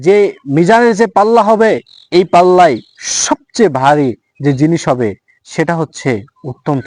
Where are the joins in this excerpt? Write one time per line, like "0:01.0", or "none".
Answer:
none

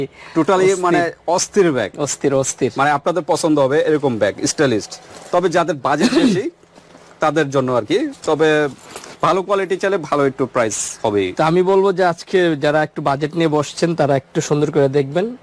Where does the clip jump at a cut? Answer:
none

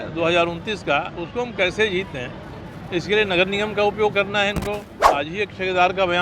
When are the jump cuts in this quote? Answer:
0:05.0

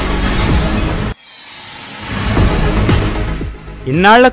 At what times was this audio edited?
0:01.1
0:02.8

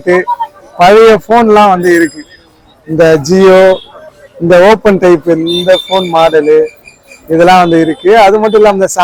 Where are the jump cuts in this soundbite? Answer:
none

